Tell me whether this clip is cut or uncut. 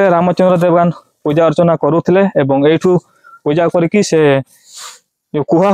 uncut